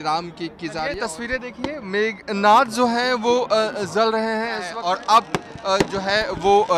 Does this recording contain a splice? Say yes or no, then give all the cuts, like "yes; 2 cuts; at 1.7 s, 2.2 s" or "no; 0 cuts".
yes; 2 cuts; at 0.9 s, 4.7 s